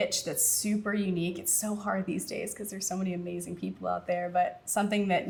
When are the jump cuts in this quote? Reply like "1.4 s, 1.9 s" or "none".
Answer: none

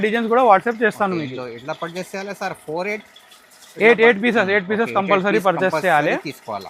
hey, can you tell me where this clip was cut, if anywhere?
none

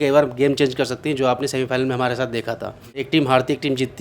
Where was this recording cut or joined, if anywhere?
3.0 s

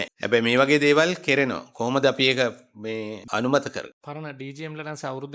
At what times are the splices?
3.9 s

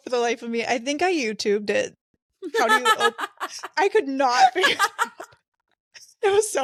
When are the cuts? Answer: none

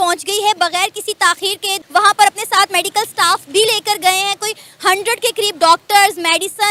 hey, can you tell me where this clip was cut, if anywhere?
none

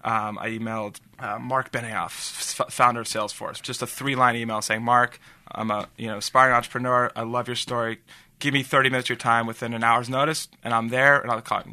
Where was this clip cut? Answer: 1.1 s, 3.6 s

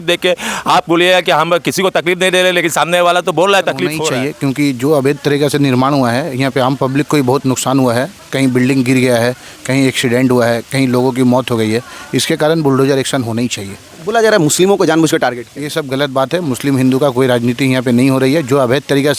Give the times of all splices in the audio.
4.0 s

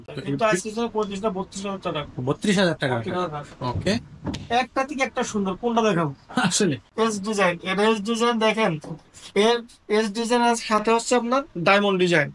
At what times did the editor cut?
6.9 s

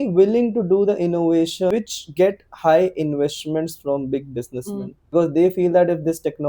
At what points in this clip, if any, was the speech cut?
1.7 s, 5.1 s

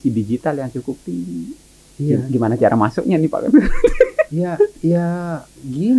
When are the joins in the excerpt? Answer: none

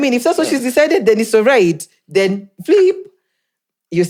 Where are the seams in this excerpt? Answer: none

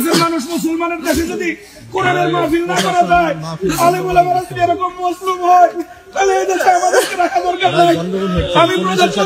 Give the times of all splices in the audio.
none

